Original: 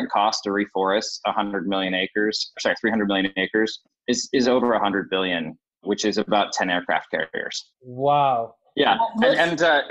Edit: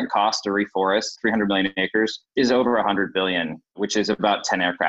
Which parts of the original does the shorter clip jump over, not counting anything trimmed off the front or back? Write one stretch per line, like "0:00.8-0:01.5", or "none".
0:01.2-0:02.8
0:03.9-0:04.2
0:05.6-0:05.7